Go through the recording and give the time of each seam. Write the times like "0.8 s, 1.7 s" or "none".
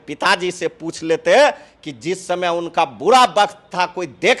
none